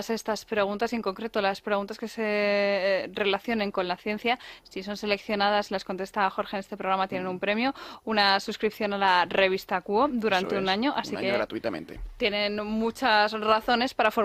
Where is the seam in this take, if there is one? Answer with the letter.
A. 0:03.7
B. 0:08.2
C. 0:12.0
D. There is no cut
C